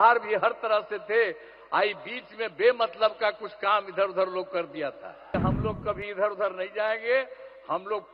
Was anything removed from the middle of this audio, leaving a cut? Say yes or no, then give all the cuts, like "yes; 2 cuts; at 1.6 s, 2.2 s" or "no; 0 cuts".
yes; 1 cut; at 5.3 s